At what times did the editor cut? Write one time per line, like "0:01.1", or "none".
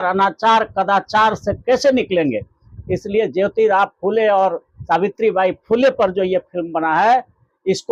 none

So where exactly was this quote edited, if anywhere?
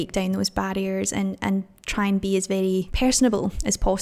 0:02.9

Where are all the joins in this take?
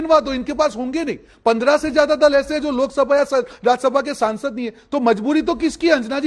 none

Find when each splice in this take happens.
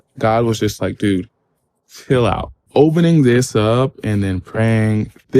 0:02.5

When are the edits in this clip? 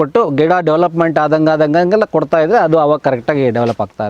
none

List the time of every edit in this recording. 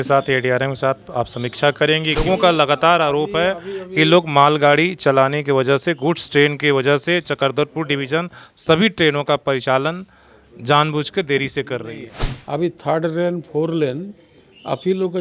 0:02.2
0:12.2

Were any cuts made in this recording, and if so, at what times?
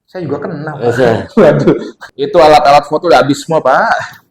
0:02.0

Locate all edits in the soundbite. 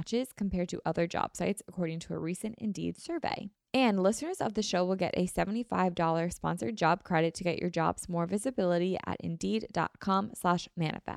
0:03.5

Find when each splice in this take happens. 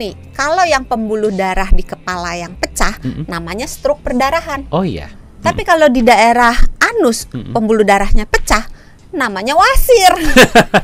none

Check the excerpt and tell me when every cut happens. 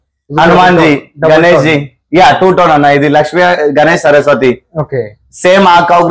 none

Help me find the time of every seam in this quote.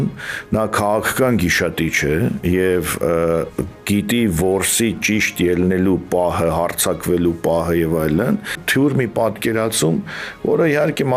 0:08.6

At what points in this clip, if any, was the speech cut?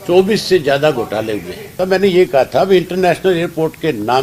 0:01.8

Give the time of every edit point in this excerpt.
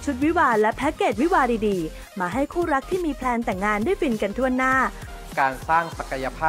0:05.1

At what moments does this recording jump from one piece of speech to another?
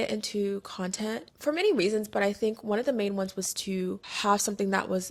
none

